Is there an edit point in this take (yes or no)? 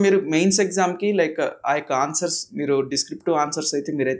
no